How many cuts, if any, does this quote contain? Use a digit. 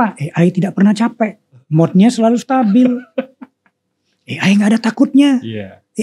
1